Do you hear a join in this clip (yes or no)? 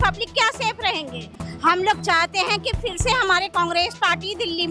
no